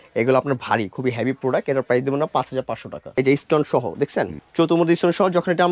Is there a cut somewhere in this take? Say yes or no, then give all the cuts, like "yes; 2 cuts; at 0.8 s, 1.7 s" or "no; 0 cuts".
yes; 2 cuts; at 3.1 s, 4.4 s